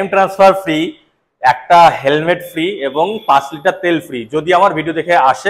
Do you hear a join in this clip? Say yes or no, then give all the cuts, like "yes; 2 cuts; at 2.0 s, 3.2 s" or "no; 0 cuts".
no; 0 cuts